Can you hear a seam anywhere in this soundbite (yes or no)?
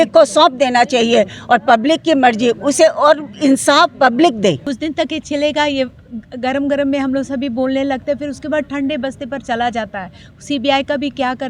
yes